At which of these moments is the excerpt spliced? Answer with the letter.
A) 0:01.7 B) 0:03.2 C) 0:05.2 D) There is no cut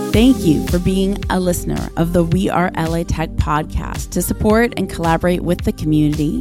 D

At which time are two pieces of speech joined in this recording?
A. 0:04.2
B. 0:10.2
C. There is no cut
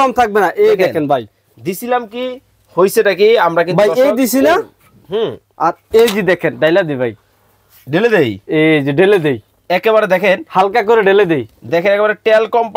C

